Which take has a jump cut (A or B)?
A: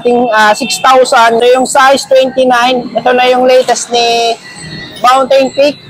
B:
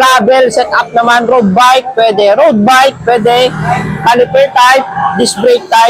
A